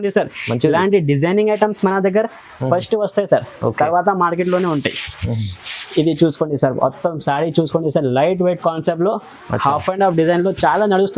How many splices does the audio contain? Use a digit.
0